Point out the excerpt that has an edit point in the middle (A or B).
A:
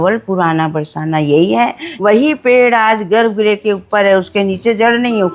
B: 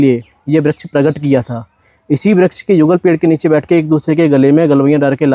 A